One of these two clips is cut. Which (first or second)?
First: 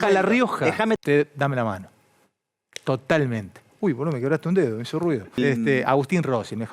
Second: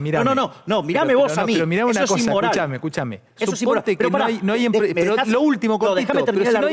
first